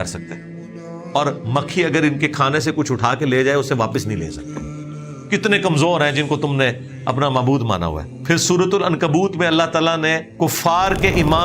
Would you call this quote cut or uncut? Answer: cut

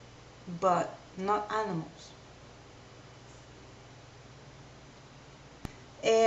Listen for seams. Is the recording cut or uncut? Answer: uncut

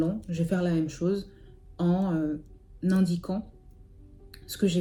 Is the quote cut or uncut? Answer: uncut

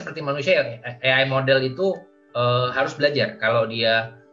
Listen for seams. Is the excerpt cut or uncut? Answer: uncut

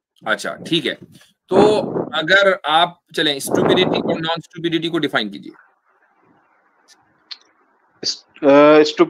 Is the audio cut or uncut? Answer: uncut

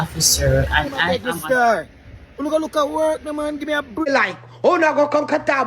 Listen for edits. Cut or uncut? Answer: cut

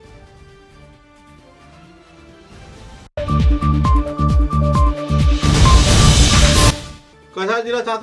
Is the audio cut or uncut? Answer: cut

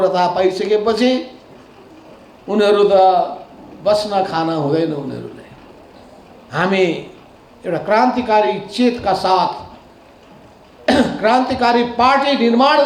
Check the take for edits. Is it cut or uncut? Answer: uncut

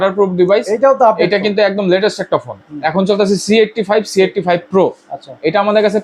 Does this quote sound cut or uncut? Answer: uncut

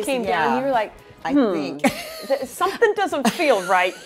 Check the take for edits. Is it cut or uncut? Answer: uncut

